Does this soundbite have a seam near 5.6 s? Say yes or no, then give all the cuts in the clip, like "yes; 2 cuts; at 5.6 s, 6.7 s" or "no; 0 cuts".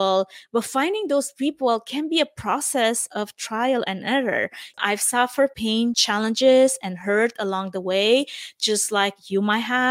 yes; 2 cuts; at 4.6 s, 5.6 s